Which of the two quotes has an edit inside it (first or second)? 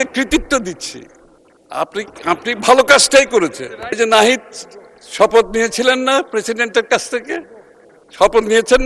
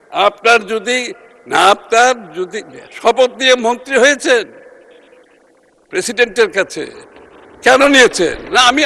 first